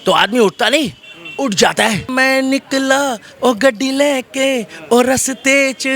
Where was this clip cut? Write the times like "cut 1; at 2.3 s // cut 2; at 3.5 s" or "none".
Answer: cut 1; at 2.1 s